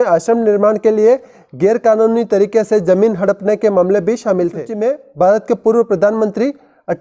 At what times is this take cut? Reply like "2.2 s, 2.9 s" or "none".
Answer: 4.7 s